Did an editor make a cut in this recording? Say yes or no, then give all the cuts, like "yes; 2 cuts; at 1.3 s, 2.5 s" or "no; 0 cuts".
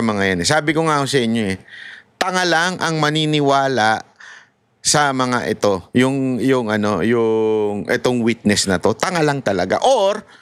no; 0 cuts